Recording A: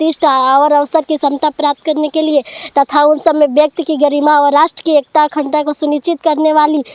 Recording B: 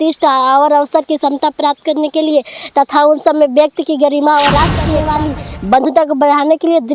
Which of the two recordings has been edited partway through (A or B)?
B